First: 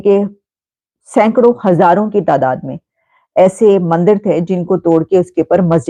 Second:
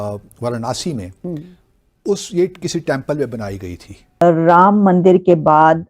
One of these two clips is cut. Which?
second; 1 cut; at 4.2 s

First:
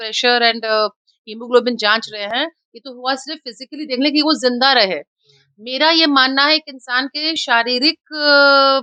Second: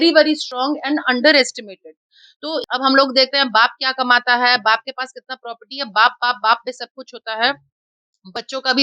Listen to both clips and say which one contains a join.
second; 1 cut; at 2.6 s

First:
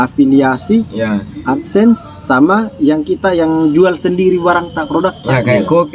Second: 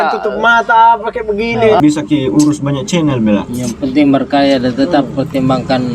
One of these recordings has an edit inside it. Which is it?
second; 1 cut; at 1.8 s

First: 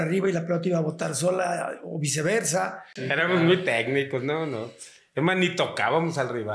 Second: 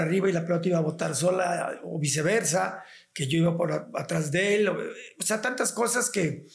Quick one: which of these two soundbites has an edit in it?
first; 1 cut; at 3.1 s

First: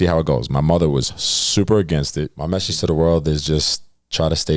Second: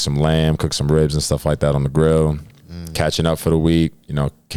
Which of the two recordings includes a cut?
first; 1 cut; at 2.4 s

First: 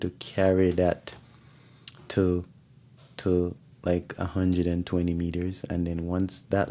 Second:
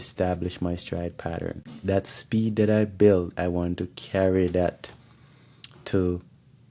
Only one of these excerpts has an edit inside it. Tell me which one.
second; 1 cut; at 1.7 s

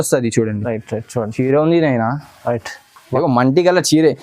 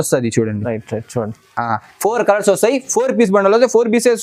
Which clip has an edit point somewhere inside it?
first; 1 cut; at 1.3 s

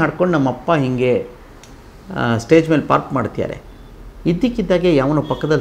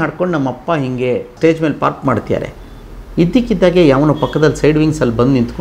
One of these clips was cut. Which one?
second; 1 cut; at 1.3 s

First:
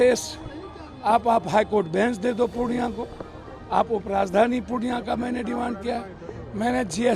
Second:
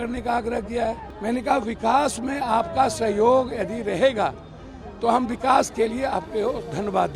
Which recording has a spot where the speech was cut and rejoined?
second; 1 cut; at 1.1 s

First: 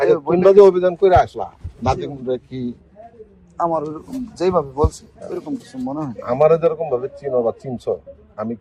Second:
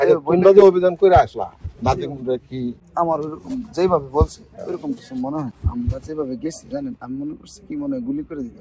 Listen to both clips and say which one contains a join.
second; 2 cuts; at 2.8 s, 5.5 s

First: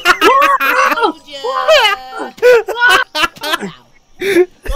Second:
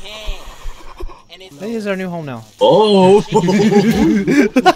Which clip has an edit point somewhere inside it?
second; 1 cut; at 1.5 s

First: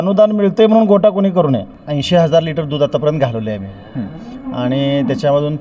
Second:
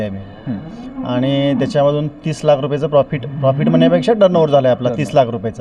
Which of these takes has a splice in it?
first; 1 cut; at 1.7 s

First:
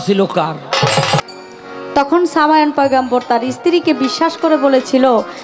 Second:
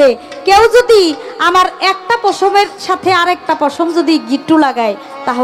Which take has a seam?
first; 1 cut; at 1.2 s

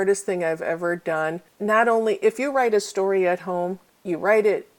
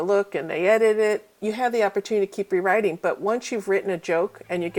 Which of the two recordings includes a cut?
first; 2 cuts; at 1.6 s, 3.9 s

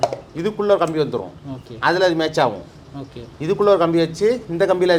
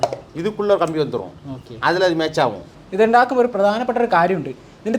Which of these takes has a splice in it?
second; 1 cut; at 2.8 s

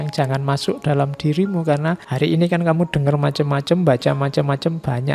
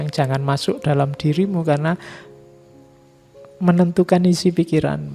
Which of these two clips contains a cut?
first; 1 cut; at 2.1 s

